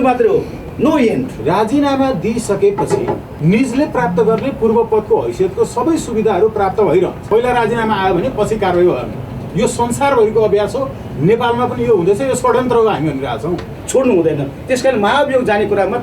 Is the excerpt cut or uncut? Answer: cut